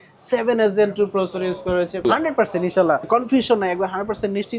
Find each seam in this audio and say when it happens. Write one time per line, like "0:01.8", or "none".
0:02.0
0:03.1